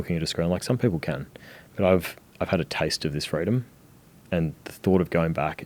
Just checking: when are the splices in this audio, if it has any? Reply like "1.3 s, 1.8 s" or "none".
none